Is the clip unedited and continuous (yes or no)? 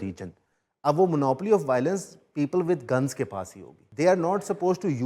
no